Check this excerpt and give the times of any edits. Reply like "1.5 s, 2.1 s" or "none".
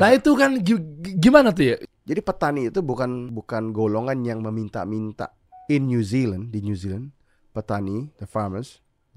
1.9 s, 3.3 s